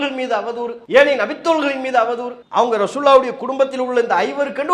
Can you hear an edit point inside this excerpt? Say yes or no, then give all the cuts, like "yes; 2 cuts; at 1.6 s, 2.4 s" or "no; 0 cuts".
yes; 1 cut; at 2.4 s